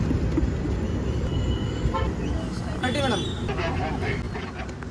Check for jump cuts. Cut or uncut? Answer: cut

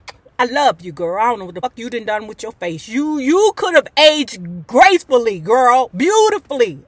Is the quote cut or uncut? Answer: cut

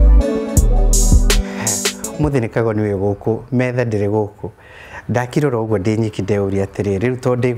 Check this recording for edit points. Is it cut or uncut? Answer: cut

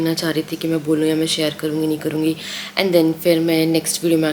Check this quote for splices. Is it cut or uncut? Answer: uncut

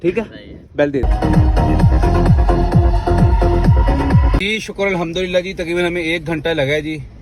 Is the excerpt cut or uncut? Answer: cut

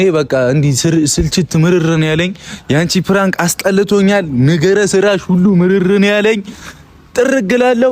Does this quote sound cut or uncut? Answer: uncut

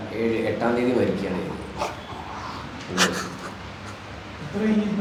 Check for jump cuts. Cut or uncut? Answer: uncut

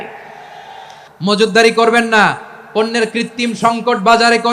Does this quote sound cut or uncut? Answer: cut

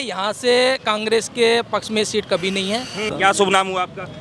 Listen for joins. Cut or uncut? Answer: cut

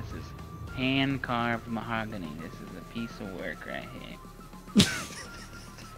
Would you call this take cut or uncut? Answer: uncut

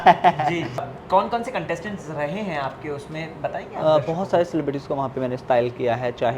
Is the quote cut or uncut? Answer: cut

